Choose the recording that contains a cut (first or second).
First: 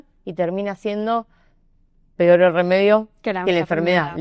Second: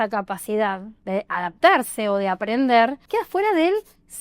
second